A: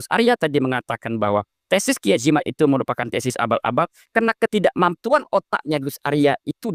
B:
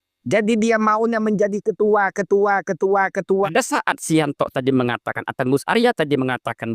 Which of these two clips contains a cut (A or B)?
B